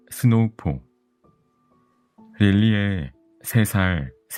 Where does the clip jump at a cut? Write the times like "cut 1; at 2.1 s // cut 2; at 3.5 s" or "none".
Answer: none